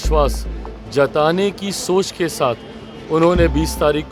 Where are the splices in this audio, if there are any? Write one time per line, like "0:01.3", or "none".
none